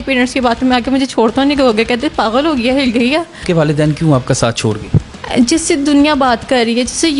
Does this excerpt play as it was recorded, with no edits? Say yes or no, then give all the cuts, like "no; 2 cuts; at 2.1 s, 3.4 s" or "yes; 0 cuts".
no; 2 cuts; at 3.4 s, 5.2 s